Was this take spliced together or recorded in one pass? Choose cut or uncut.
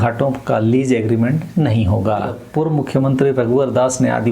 cut